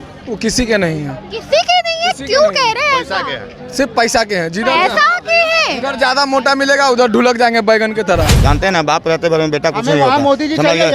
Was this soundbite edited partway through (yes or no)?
yes